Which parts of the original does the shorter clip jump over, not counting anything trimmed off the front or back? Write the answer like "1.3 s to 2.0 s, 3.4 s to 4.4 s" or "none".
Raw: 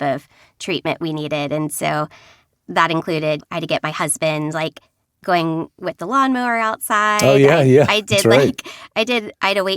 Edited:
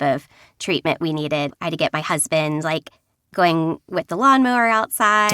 1.5 s to 3.4 s